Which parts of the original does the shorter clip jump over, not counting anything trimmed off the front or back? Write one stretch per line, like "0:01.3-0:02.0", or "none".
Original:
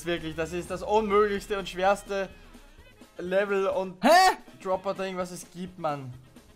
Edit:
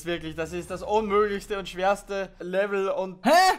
0:02.4-0:03.1